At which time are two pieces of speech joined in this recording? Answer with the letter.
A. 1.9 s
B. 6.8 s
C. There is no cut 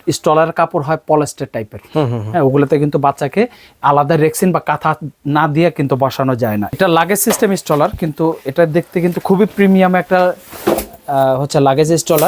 B